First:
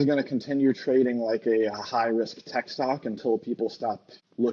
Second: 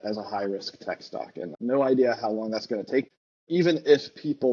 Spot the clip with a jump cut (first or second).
second